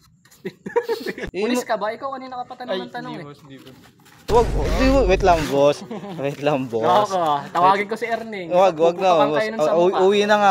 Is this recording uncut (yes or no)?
no